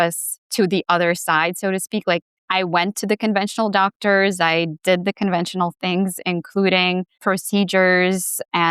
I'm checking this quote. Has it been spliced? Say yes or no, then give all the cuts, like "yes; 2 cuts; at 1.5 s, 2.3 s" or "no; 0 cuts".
yes; 2 cuts; at 2.4 s, 7.1 s